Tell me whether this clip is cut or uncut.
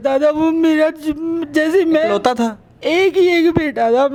uncut